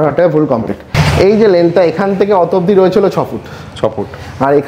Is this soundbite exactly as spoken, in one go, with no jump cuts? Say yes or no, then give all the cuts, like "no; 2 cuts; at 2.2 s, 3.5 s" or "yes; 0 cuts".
no; 1 cut; at 0.9 s